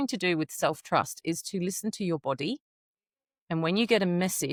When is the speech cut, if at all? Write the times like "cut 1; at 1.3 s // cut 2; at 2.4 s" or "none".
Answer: none